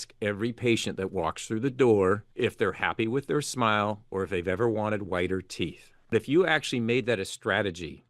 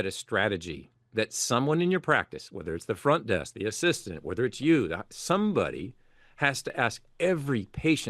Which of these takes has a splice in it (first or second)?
first